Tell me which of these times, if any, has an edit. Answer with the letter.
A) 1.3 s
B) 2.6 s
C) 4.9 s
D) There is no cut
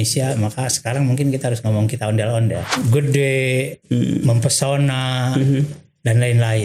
B